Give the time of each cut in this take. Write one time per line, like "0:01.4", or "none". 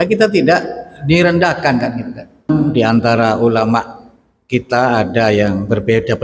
0:02.5